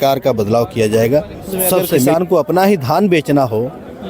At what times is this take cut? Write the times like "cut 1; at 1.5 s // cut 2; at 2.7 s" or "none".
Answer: cut 1; at 2.1 s